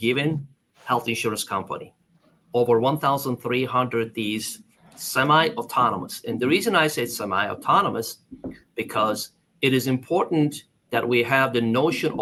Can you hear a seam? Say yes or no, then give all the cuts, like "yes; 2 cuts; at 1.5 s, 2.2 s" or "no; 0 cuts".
no; 0 cuts